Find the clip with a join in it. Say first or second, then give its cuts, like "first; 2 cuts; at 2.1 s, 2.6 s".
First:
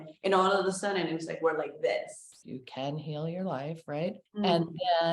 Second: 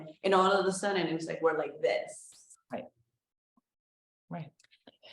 first; 2 cuts; at 2.4 s, 4.2 s